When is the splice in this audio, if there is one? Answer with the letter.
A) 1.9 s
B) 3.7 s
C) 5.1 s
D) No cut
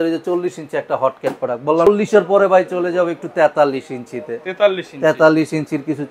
A